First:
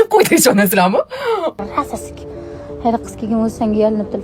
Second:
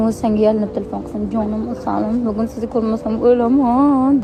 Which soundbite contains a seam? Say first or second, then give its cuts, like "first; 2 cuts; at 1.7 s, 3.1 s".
first; 1 cut; at 1.6 s